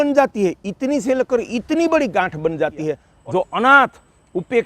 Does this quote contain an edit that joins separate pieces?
yes; 1 cut; at 3.1 s

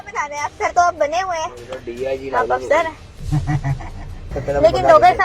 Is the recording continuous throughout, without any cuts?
no; 1 cut; at 4.2 s

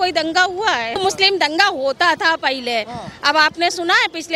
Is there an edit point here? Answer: yes; 1 cut; at 1.0 s

